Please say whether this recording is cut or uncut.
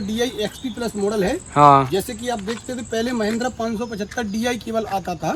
uncut